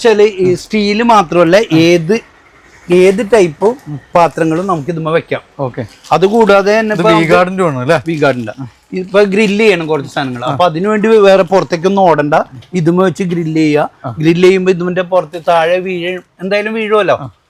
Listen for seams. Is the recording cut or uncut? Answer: uncut